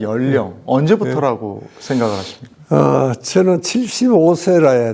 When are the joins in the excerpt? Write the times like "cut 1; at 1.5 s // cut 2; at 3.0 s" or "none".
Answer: none